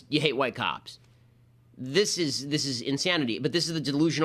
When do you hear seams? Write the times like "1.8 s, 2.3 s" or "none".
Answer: none